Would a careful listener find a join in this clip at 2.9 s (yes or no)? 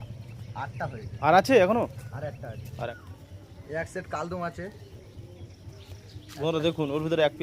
yes